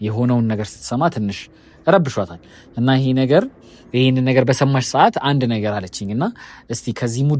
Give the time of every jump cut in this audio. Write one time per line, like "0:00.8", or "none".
none